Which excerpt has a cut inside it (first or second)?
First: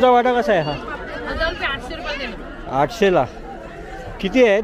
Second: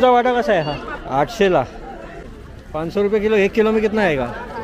second